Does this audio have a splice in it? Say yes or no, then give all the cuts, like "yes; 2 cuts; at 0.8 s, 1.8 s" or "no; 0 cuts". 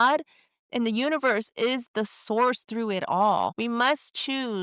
yes; 1 cut; at 3.5 s